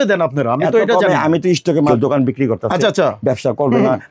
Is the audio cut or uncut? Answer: cut